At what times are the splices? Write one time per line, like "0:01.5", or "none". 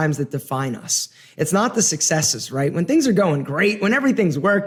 none

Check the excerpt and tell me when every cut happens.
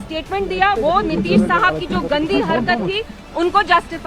none

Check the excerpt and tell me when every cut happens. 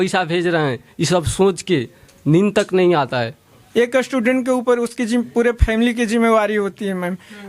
0:03.6

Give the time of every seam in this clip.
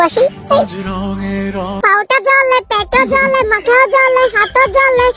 0:01.8

